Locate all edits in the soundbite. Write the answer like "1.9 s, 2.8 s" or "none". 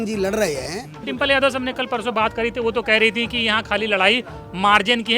1.0 s